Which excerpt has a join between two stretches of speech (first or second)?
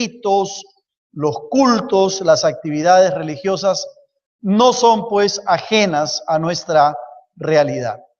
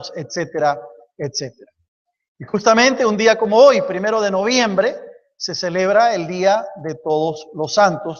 first